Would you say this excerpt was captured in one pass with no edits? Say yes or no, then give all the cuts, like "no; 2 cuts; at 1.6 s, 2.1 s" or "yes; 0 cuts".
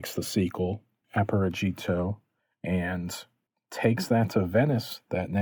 yes; 0 cuts